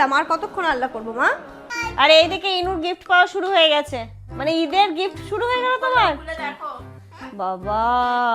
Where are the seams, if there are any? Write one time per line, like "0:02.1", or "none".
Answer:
0:01.7